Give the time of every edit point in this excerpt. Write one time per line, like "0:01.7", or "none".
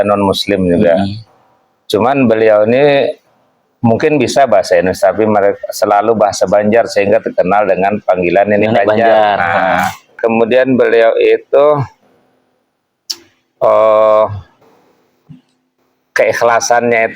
0:10.1